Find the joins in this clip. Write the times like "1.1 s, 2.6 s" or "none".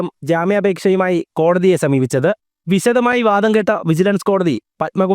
2.5 s